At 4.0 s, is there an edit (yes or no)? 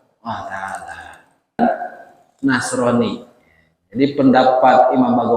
no